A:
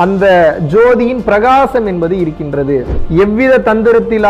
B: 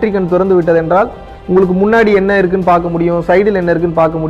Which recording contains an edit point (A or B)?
A